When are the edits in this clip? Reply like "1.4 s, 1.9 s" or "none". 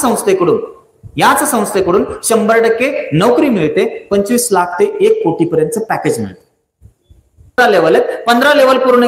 7.6 s